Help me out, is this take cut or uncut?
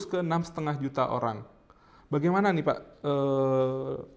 uncut